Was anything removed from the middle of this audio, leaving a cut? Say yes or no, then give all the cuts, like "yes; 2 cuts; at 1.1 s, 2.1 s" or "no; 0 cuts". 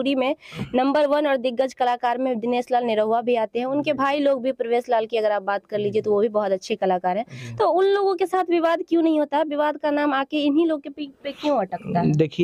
no; 0 cuts